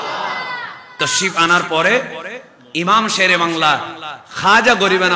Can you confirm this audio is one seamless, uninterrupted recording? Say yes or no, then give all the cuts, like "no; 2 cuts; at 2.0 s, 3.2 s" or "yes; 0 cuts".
no; 1 cut; at 1.0 s